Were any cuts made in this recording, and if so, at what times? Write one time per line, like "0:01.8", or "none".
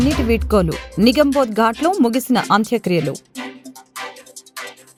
none